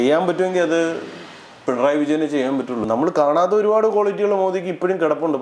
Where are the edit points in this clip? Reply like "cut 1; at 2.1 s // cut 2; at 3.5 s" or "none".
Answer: cut 1; at 2.8 s